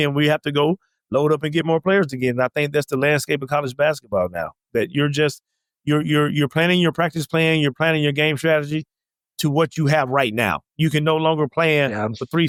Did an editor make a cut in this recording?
no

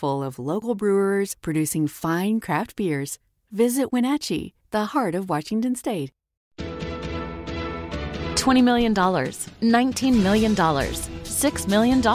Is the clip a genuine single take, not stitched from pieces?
no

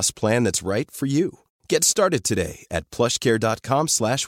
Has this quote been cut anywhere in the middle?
no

